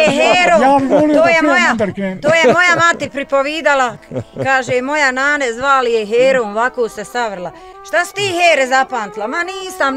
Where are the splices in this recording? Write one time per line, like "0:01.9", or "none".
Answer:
none